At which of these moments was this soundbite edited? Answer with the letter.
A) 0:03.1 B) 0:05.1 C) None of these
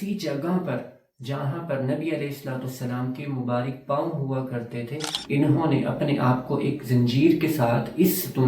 B